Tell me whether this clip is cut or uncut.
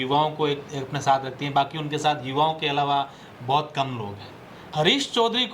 cut